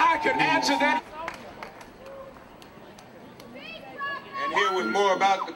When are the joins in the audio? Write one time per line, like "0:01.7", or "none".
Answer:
0:01.0